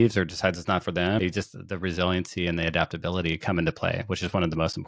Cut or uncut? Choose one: cut